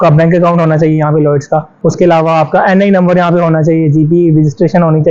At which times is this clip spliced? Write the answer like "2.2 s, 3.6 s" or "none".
1.7 s